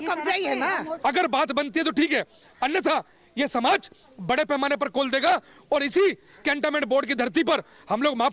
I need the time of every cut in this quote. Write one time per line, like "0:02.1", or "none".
0:00.9